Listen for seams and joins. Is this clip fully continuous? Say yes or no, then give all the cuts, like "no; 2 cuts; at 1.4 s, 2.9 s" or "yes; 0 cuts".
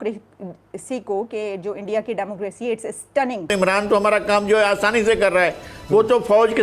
no; 1 cut; at 3.5 s